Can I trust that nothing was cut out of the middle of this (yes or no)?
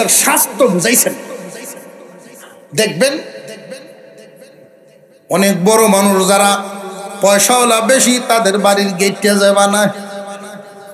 yes